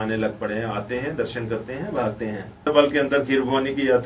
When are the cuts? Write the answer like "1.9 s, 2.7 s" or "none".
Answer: 2.7 s